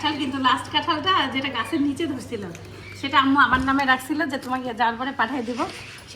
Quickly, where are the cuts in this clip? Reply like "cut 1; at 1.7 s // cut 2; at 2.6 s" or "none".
none